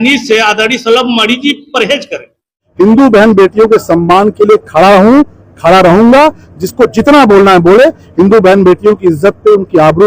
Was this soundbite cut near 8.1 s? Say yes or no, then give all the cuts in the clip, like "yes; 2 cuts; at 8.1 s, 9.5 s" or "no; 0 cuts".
no; 1 cut; at 2.6 s